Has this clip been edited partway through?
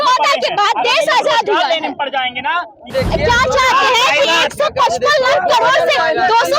yes; 1 cut; at 2.9 s

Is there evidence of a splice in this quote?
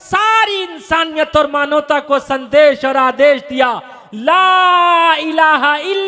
no; 0 cuts

